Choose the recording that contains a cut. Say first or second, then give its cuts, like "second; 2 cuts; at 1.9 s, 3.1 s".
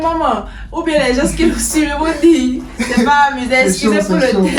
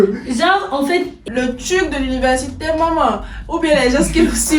second; 1 cut; at 1.2 s